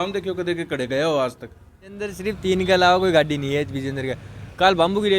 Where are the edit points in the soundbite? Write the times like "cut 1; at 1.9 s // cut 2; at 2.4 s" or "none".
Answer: cut 1; at 2.2 s